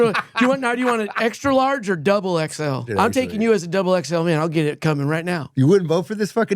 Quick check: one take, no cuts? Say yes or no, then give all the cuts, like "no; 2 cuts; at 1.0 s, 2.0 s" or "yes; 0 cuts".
no; 2 cuts; at 2.9 s, 5.5 s